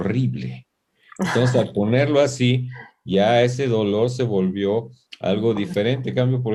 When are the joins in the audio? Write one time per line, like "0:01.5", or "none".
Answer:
none